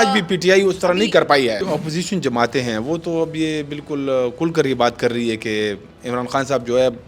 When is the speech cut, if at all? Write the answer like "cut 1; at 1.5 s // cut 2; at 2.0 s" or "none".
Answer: cut 1; at 1.6 s